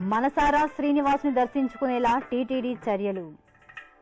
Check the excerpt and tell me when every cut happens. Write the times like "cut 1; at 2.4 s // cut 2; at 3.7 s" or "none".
none